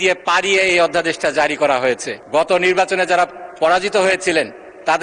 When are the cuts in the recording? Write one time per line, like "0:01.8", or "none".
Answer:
0:02.1